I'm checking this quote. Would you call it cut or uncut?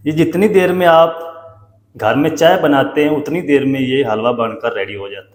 uncut